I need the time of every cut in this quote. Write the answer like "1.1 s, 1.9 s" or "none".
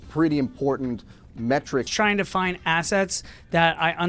1.9 s